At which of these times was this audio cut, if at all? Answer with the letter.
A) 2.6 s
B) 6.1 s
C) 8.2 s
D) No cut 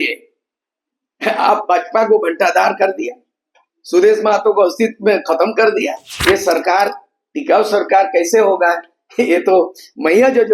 B